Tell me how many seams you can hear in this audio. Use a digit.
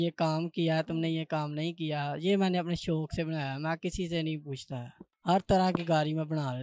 1